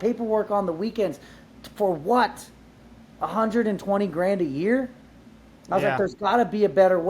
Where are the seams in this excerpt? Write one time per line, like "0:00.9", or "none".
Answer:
none